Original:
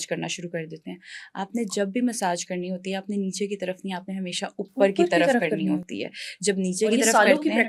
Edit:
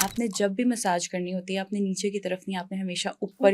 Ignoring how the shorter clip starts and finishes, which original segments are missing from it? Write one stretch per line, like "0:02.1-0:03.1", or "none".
none